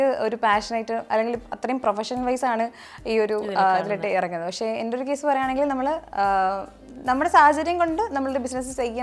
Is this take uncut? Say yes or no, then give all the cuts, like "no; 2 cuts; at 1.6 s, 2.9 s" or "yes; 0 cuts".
yes; 0 cuts